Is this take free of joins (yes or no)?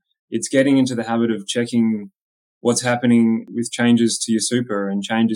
no